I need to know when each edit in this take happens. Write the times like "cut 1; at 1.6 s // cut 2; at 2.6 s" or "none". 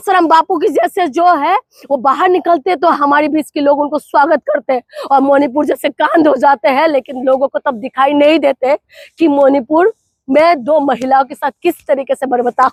none